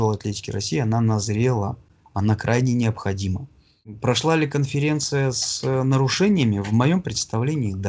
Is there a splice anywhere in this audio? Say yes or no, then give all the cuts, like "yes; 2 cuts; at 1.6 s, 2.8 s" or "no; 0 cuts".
yes; 1 cut; at 4.0 s